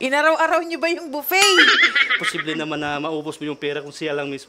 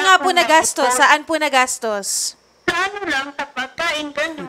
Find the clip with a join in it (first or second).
first